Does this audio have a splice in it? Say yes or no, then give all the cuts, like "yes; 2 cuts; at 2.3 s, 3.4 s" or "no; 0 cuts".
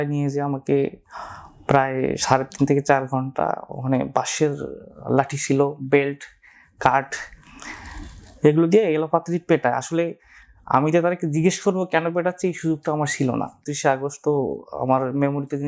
yes; 1 cut; at 13.7 s